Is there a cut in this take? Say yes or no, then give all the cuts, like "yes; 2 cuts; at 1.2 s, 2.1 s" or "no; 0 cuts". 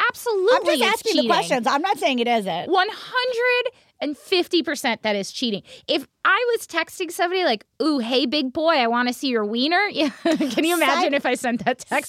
no; 0 cuts